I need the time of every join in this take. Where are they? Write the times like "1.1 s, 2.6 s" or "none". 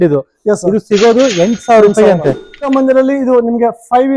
2.7 s